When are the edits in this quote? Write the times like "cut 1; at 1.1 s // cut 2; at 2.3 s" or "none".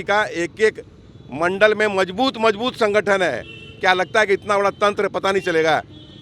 none